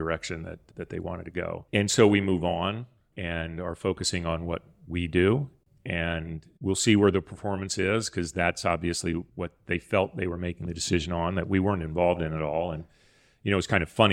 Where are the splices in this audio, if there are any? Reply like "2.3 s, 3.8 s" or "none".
6.4 s, 9.3 s